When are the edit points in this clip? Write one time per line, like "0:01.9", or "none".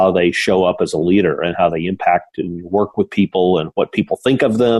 none